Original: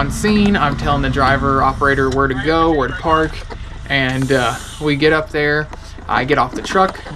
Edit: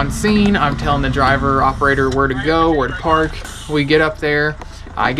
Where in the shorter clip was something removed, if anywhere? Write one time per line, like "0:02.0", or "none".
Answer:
0:03.5